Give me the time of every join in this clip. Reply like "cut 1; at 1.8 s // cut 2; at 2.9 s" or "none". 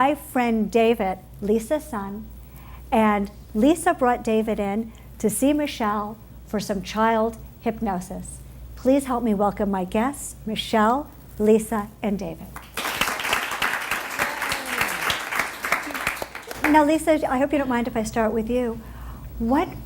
cut 1; at 8.9 s